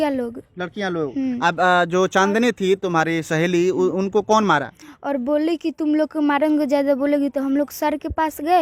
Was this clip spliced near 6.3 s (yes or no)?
no